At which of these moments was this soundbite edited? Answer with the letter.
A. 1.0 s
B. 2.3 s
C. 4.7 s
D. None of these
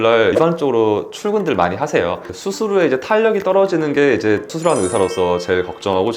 B